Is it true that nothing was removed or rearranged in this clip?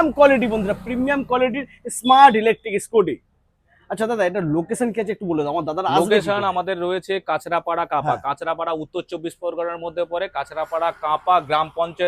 yes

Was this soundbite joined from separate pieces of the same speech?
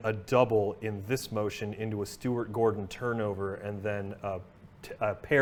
no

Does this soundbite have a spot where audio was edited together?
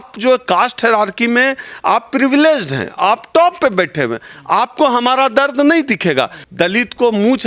yes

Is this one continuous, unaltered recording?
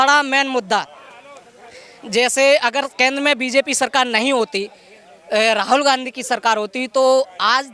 yes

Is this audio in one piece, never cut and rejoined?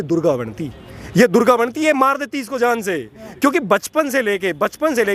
yes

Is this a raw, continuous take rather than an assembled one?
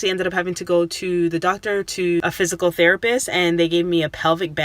no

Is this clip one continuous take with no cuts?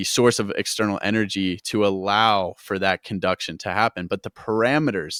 yes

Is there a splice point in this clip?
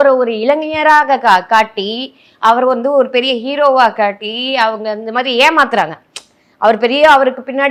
no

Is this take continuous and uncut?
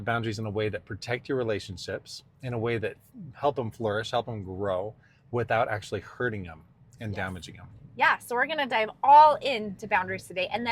yes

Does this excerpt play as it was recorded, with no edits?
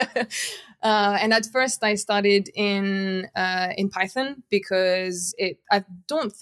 yes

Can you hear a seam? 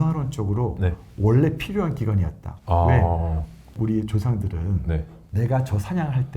yes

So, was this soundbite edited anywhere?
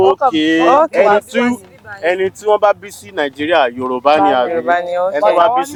no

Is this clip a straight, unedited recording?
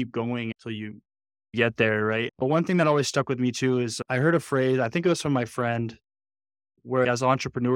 no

